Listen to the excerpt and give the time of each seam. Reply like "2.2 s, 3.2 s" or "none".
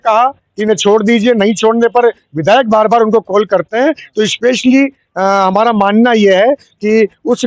none